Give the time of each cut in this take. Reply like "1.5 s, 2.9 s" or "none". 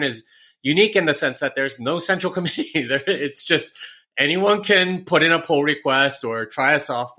none